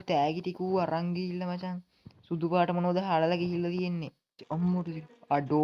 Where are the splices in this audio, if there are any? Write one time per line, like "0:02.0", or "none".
0:04.4